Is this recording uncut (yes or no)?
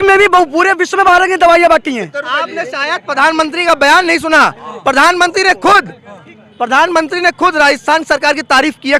yes